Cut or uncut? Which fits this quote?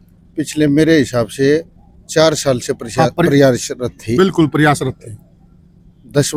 uncut